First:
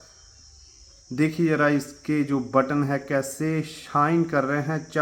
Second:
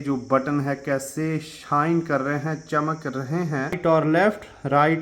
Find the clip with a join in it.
second; 1 cut; at 3.8 s

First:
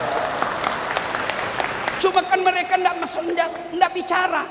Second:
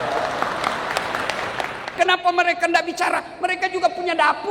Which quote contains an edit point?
second; 1 cut; at 1.8 s

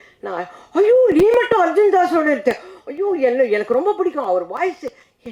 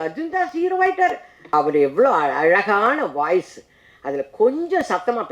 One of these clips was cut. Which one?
second; 1 cut; at 1.4 s

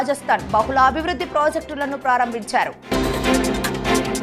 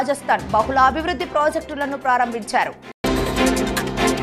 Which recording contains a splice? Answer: first; 1 cut; at 2.8 s

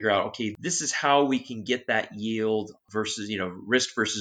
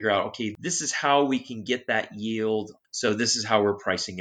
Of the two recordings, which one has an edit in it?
second; 1 cut; at 2.8 s

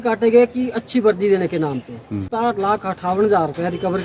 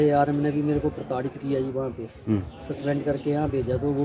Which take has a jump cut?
first; 1 cut; at 2.3 s

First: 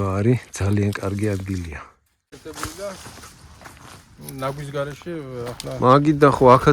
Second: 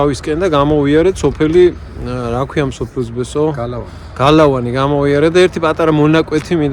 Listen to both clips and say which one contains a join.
first; 1 cut; at 2.4 s

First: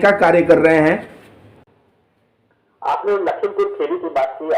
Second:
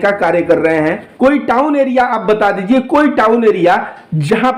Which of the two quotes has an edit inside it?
second; 1 cut; at 1.1 s

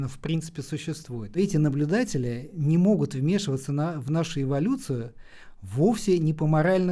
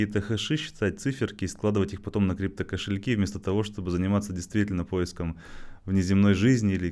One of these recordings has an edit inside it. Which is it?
first; 2 cuts; at 1.4 s, 2.5 s

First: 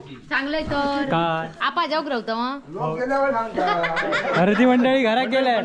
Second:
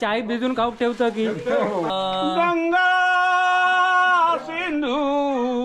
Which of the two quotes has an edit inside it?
second; 1 cut; at 1.9 s

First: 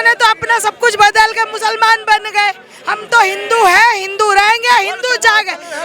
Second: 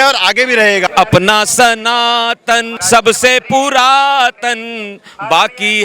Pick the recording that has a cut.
second; 2 cuts; at 0.9 s, 2.7 s

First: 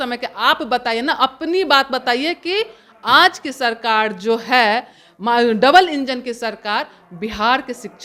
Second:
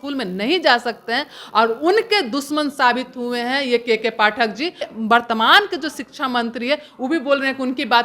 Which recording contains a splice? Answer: second; 1 cut; at 4.8 s

